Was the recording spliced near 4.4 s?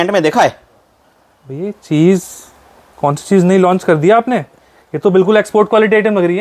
no; 0 cuts

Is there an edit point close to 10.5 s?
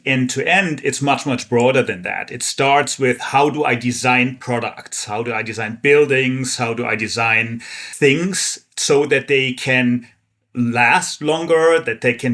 no; 1 cut; at 7.9 s

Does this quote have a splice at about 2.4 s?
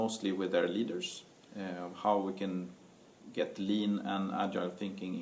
no; 1 cut; at 3.9 s

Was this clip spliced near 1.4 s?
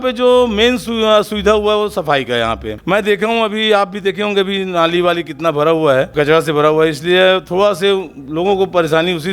no; 2 cuts; at 2.7 s, 6.1 s

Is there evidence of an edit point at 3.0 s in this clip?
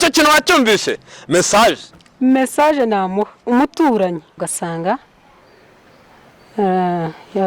no; 1 cut; at 4.5 s

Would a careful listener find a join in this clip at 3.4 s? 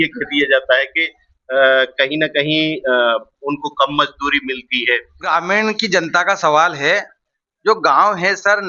no; 1 cut; at 5.2 s

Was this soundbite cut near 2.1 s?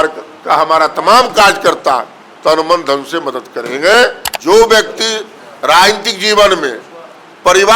no; 1 cut; at 4.3 s

